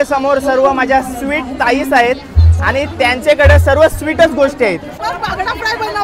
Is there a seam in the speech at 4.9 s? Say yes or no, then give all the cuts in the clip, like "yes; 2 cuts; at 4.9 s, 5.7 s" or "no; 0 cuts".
yes; 1 cut; at 4.9 s